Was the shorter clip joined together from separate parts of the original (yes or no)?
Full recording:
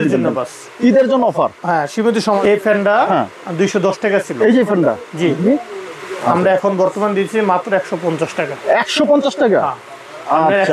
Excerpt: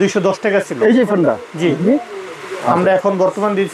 no